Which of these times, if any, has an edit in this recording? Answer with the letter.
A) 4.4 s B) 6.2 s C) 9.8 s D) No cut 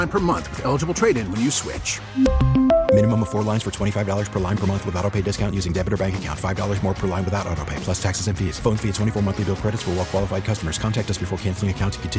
D